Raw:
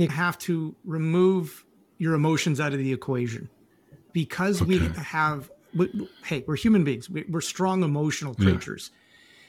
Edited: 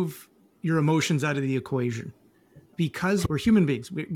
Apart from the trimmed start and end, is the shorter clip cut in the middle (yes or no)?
yes